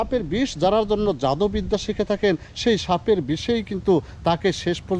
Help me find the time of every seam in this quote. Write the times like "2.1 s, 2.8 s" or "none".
none